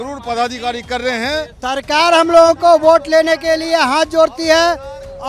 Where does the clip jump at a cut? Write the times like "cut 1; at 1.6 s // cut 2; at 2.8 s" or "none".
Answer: cut 1; at 1.5 s